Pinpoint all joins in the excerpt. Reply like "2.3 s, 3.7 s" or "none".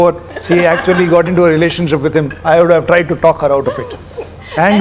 none

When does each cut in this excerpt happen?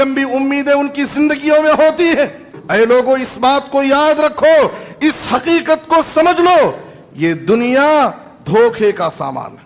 2.5 s

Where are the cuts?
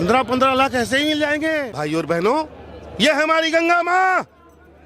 1.7 s

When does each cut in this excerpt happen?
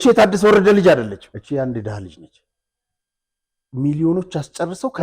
1.3 s

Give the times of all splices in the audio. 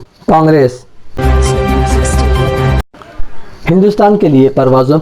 1.1 s

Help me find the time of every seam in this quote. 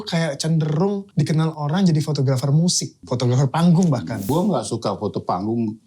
1.1 s, 3.0 s, 4.3 s

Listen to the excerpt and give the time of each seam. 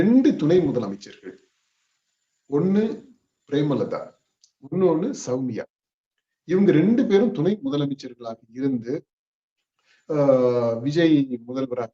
none

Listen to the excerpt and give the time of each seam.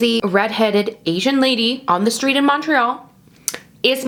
none

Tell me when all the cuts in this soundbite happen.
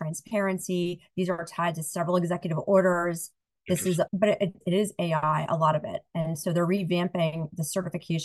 none

